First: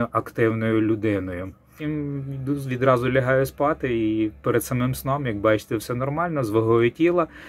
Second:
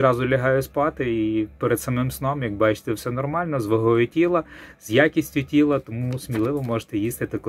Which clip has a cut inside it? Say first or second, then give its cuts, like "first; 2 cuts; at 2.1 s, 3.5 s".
first; 1 cut; at 1.8 s